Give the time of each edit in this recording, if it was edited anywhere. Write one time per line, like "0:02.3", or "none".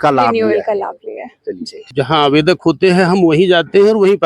0:01.9